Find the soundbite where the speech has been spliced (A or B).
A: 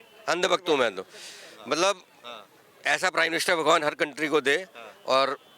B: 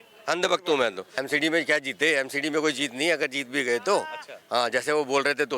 B